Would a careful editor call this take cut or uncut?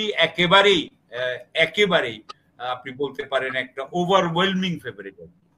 uncut